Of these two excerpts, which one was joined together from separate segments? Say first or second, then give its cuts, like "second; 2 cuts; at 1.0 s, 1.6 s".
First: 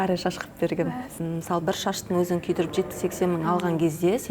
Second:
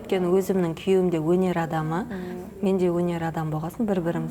first; 1 cut; at 1.2 s